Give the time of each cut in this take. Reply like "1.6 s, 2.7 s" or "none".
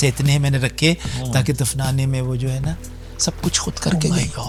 none